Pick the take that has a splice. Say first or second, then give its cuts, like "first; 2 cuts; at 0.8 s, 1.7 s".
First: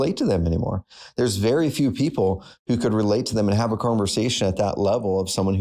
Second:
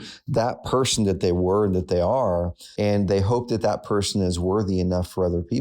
second; 1 cut; at 2.6 s